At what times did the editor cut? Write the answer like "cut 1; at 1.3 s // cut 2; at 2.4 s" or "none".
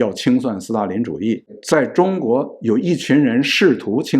cut 1; at 1.6 s